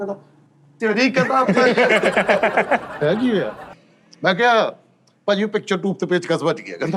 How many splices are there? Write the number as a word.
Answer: one